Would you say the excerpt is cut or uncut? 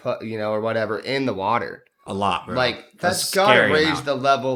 uncut